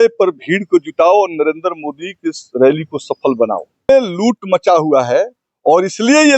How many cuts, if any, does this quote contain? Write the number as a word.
one